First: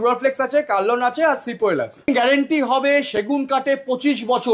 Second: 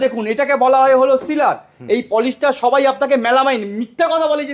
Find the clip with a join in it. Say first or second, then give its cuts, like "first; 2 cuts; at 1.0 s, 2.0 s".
first; 1 cut; at 2.1 s